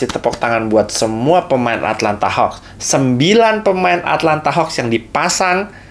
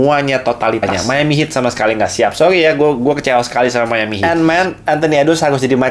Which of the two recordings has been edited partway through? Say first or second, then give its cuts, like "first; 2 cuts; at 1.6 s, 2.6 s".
second; 2 cuts; at 0.9 s, 4.1 s